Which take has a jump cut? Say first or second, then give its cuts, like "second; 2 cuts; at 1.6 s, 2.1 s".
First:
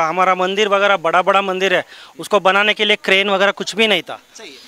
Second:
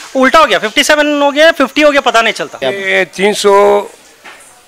second; 1 cut; at 2.5 s